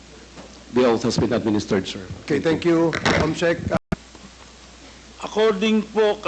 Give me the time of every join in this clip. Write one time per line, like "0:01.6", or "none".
none

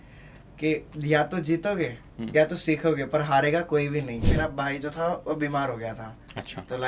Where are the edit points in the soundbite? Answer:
0:04.2

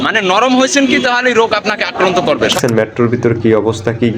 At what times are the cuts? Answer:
0:02.6

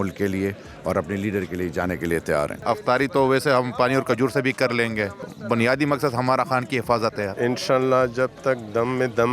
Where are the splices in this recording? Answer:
0:02.5
0:07.3

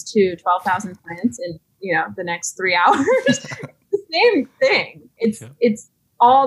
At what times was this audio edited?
none

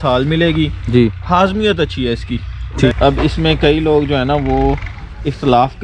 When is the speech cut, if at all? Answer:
0:02.9

